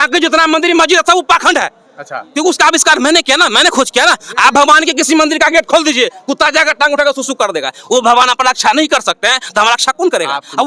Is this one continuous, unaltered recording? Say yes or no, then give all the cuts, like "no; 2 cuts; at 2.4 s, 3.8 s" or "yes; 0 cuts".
yes; 0 cuts